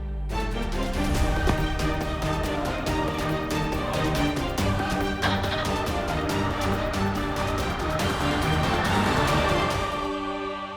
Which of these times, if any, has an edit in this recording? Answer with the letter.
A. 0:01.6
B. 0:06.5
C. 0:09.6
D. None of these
C